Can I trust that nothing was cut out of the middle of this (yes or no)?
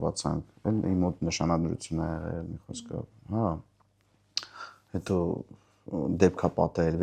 yes